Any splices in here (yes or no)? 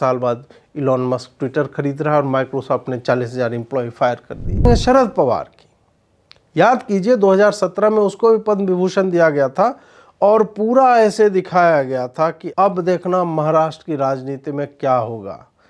yes